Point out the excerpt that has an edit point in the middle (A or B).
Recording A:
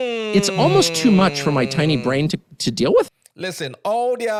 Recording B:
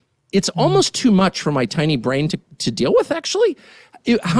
B